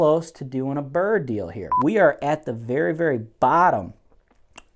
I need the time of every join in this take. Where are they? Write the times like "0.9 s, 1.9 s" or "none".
1.6 s